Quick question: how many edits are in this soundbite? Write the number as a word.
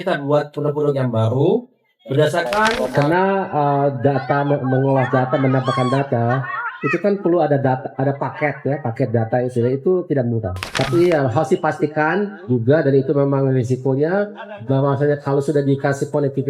two